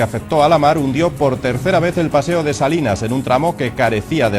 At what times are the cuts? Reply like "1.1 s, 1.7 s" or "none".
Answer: 1.6 s